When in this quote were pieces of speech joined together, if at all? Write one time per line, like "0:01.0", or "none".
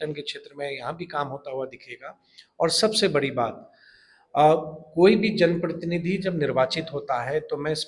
none

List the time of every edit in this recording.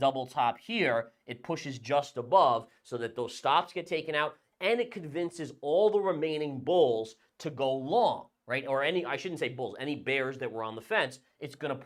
none

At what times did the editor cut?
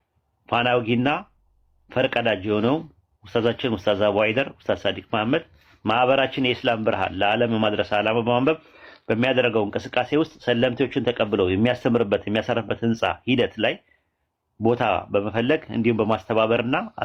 none

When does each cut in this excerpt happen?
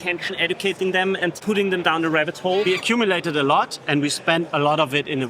0:01.4
0:02.7

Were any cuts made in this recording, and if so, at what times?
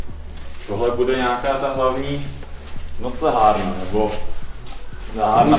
none

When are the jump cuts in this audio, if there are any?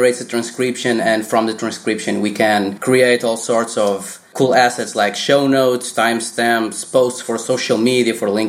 0:02.8
0:04.2

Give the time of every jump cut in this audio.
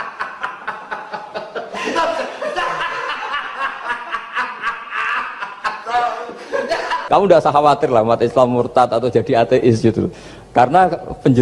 0:07.0

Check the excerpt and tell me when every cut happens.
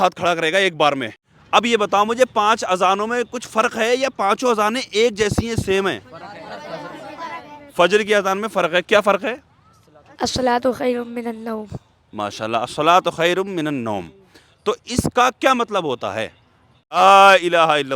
0:01.2
0:17.0

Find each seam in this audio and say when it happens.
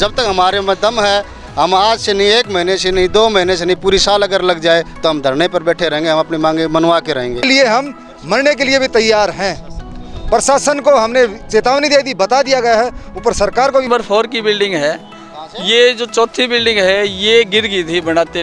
0:07.4
0:13.9

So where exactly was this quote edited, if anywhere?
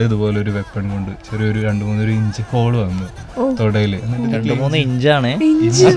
none

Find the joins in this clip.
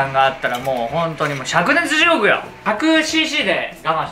0:02.6

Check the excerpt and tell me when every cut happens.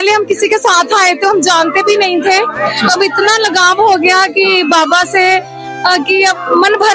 none

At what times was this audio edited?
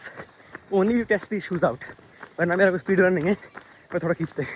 none

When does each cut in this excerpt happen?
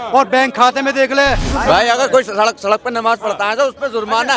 0:01.5

